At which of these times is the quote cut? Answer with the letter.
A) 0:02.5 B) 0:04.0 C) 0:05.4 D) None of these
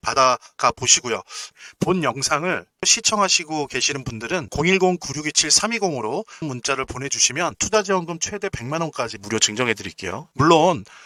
D